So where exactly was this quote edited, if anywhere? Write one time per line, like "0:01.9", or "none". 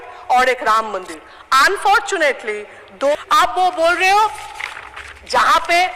0:03.1